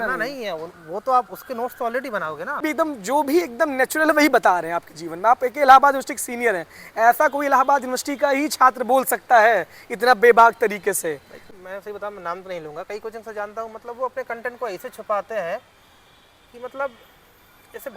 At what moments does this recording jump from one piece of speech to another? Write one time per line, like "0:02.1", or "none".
0:02.6
0:11.5